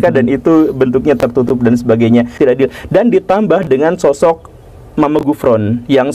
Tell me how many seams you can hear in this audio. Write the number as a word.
one